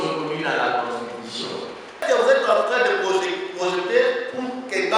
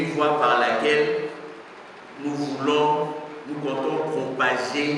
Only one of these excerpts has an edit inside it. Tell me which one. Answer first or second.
first